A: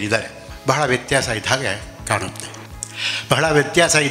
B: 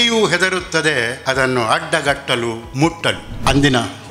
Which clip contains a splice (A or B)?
B